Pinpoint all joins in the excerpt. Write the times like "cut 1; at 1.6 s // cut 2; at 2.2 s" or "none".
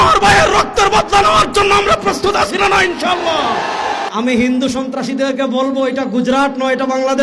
cut 1; at 4.1 s

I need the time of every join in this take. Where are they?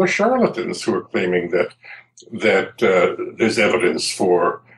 none

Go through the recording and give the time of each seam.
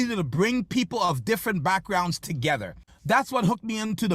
cut 1; at 2.9 s

